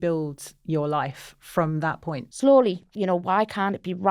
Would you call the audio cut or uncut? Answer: cut